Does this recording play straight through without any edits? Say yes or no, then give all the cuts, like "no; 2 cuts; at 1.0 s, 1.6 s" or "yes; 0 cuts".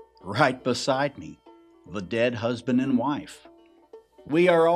no; 1 cut; at 3.7 s